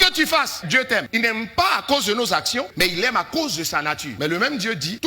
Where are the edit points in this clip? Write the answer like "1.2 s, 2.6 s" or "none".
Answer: 1.1 s, 4.1 s